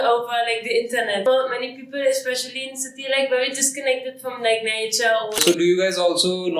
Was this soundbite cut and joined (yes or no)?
yes